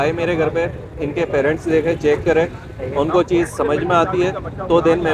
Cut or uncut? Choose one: uncut